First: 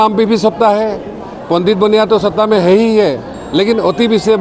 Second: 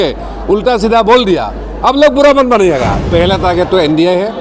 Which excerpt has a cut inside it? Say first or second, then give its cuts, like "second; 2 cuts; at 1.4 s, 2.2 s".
second; 1 cut; at 3.0 s